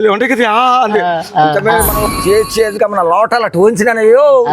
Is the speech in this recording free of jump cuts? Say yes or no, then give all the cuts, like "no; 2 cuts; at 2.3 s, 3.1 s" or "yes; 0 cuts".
no; 1 cut; at 2.0 s